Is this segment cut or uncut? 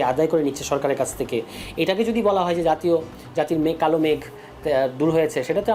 uncut